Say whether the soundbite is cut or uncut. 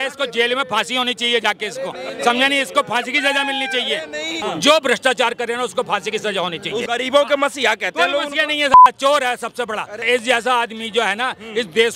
cut